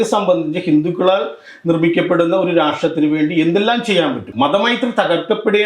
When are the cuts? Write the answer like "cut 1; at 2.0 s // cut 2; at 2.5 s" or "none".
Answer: cut 1; at 4.2 s